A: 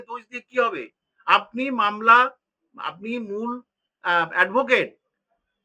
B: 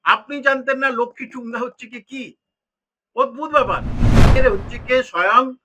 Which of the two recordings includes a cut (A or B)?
B